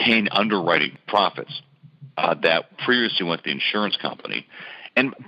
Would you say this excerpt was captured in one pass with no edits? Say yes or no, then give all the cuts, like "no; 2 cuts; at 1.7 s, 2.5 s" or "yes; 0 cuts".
no; 1 cut; at 0.9 s